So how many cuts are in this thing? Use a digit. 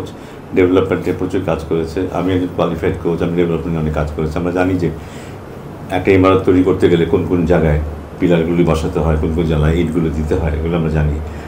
0